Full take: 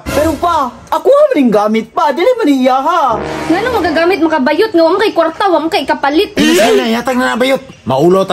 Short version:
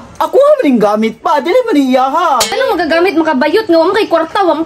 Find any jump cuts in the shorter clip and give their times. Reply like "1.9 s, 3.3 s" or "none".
2.6 s